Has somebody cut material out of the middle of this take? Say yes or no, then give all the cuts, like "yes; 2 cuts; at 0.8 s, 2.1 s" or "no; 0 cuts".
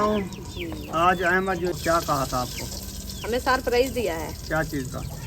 yes; 1 cut; at 1.7 s